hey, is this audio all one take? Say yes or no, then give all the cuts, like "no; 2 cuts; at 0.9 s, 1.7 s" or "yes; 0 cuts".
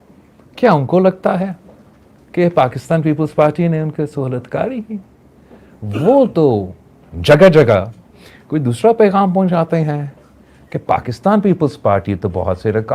yes; 0 cuts